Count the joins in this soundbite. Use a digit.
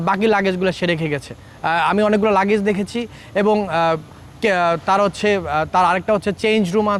0